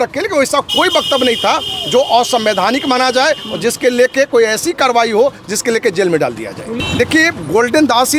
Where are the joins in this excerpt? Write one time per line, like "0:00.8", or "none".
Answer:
0:06.7